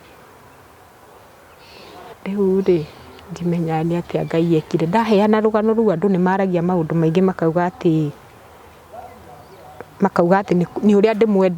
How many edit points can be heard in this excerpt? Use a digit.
1